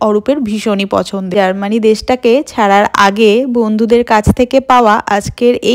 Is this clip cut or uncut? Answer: cut